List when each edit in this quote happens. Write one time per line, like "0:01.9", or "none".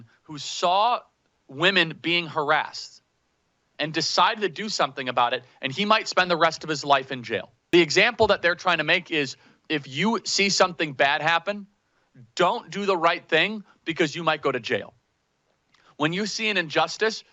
0:07.7